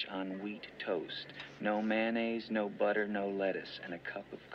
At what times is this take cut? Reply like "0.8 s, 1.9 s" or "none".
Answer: 1.3 s